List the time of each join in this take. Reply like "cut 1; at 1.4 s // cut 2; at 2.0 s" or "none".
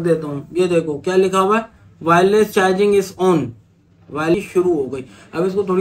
cut 1; at 4.3 s